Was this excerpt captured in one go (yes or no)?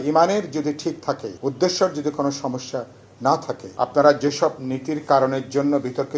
no